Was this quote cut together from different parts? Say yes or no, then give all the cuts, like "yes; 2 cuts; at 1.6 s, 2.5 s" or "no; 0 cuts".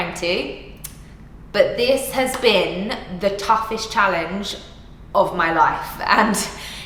no; 0 cuts